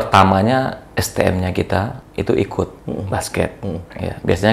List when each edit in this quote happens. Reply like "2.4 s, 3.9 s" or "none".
2.0 s, 2.8 s